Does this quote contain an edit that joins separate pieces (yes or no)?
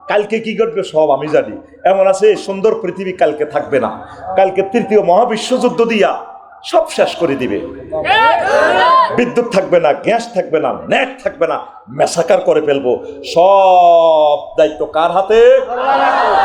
no